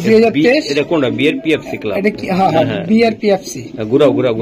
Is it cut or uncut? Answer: uncut